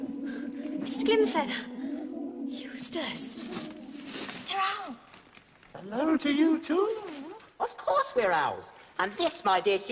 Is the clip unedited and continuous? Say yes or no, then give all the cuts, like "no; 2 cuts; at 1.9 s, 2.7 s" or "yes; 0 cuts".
yes; 0 cuts